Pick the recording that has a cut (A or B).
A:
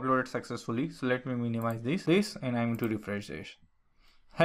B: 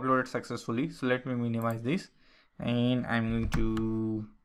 A